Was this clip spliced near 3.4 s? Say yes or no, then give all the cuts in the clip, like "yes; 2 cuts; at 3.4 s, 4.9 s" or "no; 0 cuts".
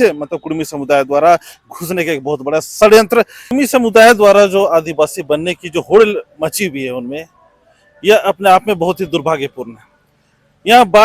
yes; 1 cut; at 3.4 s